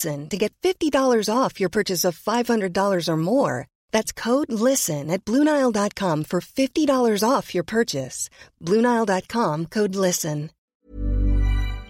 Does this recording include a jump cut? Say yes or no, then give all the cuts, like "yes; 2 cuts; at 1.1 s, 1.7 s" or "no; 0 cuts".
yes; 1 cut; at 10.6 s